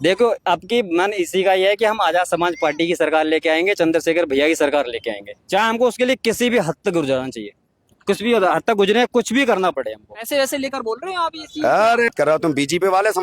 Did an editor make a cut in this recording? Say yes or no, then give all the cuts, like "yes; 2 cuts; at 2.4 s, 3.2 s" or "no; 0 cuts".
yes; 2 cuts; at 10.2 s, 12.2 s